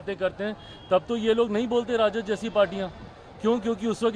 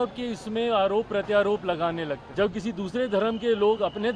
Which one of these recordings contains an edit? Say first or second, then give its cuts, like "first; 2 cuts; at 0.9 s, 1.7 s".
second; 1 cut; at 2.2 s